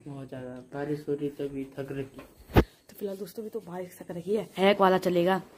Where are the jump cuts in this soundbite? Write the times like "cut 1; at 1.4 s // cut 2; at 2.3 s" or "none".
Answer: cut 1; at 4.2 s